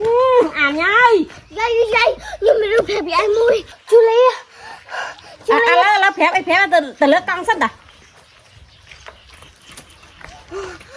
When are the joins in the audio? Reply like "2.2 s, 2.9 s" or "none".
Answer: 3.7 s, 8.0 s